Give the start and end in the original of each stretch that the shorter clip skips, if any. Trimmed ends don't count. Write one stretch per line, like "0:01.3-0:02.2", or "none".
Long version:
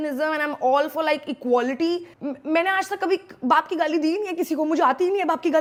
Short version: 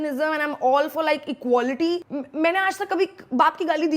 0:02.1-0:02.2